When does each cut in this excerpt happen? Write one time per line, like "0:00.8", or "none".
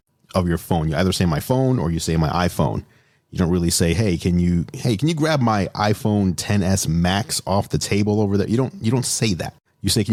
none